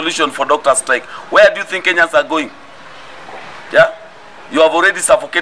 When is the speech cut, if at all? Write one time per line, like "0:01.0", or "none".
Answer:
none